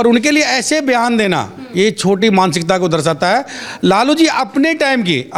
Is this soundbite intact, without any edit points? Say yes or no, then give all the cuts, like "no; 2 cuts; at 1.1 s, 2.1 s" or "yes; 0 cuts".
yes; 0 cuts